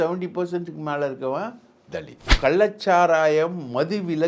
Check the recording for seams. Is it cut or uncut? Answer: cut